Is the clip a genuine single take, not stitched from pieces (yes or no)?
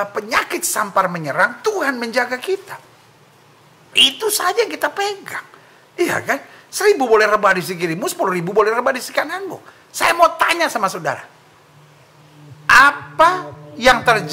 yes